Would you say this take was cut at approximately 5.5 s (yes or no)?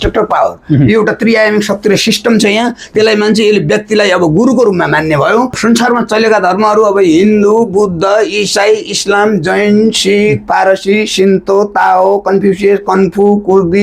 yes